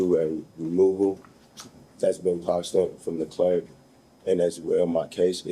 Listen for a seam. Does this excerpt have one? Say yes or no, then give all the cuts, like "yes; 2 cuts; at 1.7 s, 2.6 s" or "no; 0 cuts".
no; 0 cuts